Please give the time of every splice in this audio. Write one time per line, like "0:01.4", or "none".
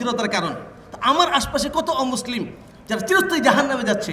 none